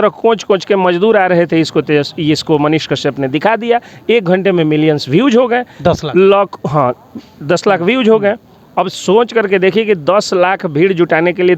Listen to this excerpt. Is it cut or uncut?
uncut